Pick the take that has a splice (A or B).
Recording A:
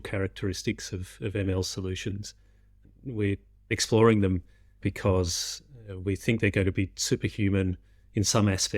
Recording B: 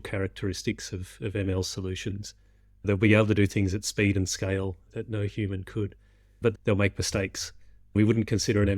B